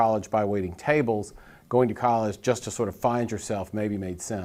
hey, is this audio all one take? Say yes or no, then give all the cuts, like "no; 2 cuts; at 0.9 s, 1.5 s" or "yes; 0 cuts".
yes; 0 cuts